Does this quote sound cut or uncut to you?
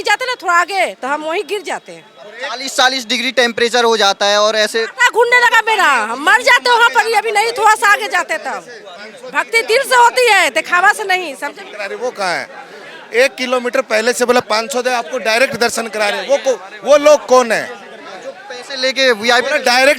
uncut